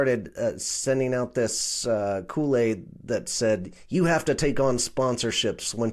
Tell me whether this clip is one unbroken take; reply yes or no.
yes